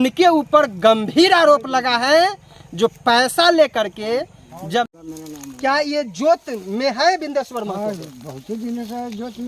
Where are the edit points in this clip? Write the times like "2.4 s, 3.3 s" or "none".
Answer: 4.9 s